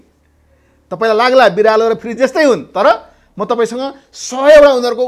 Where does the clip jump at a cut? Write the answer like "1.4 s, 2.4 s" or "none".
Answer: none